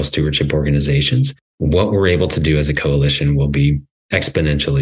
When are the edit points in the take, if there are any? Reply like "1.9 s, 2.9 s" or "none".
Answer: 1.4 s, 3.9 s